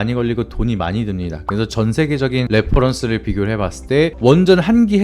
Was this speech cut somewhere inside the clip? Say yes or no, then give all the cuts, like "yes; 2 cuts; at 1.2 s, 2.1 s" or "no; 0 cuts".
yes; 1 cut; at 4.1 s